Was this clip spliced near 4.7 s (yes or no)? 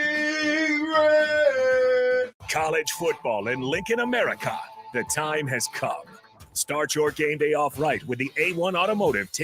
no